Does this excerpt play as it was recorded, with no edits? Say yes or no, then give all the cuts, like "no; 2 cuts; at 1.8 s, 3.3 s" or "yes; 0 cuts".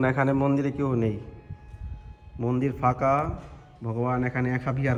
yes; 0 cuts